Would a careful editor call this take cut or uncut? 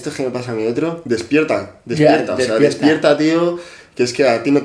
uncut